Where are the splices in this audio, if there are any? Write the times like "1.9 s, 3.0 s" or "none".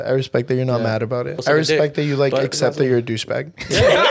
1.4 s